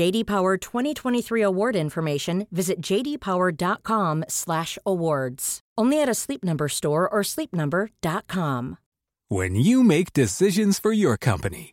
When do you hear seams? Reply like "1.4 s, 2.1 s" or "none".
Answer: 8.8 s